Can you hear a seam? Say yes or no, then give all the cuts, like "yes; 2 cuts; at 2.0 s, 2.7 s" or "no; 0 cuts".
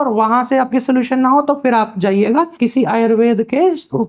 yes; 1 cut; at 2.5 s